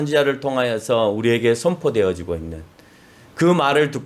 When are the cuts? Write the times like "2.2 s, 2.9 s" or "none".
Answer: none